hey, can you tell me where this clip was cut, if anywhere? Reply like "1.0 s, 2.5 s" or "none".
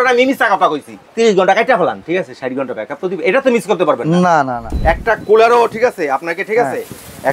1.0 s, 4.6 s